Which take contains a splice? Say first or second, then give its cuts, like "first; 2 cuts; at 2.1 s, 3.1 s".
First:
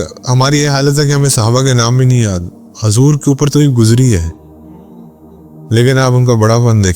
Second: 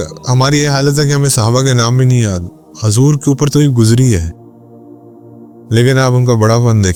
first; 2 cuts; at 4.3 s, 5.7 s